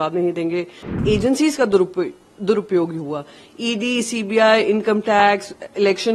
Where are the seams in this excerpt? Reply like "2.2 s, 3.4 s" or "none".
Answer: 0.9 s